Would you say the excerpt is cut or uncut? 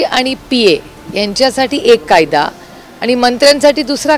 uncut